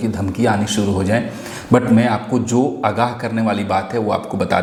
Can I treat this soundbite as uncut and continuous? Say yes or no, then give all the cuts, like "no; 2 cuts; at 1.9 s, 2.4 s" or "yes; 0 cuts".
yes; 0 cuts